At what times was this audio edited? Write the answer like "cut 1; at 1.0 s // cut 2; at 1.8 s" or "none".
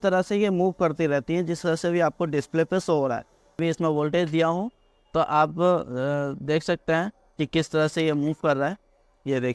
cut 1; at 3.6 s